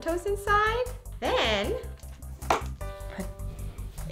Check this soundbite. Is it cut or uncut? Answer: cut